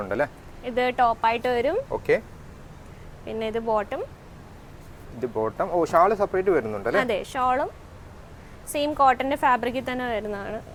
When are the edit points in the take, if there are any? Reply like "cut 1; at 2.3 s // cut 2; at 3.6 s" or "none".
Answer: none